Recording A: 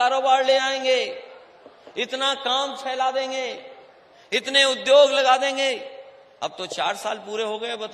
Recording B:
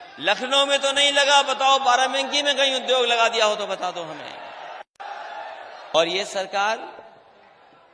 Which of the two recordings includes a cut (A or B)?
B